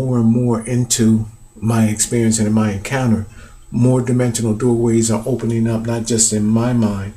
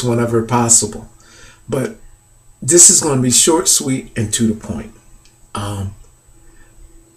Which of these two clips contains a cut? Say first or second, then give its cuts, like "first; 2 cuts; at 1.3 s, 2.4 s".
second; 1 cut; at 3.9 s